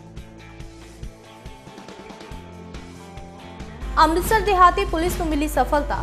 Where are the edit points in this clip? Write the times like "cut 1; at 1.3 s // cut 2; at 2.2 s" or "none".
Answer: none